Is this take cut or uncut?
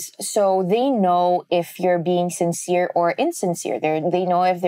uncut